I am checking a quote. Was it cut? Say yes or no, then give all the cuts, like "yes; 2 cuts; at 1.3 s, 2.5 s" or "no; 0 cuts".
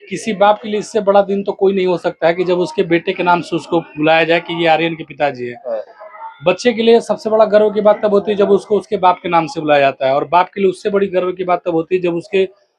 no; 0 cuts